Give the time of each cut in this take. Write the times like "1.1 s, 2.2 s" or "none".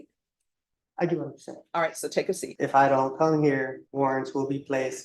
2.5 s, 3.8 s